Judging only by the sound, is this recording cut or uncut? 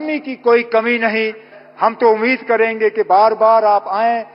cut